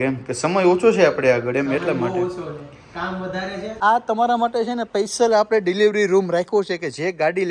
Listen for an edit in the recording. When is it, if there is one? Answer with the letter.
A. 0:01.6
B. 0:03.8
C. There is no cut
B